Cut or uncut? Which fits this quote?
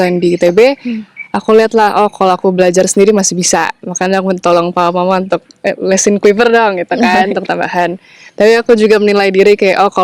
uncut